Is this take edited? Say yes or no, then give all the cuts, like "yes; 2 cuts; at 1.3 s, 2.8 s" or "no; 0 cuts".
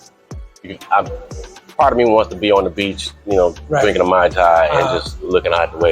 no; 0 cuts